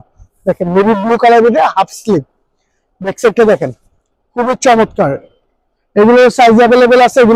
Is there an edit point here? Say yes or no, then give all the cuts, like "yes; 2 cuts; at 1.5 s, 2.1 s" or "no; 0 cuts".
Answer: no; 0 cuts